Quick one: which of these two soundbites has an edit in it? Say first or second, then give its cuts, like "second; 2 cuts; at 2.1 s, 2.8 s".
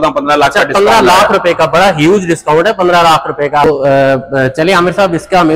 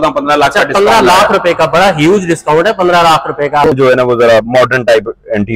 second; 1 cut; at 3.8 s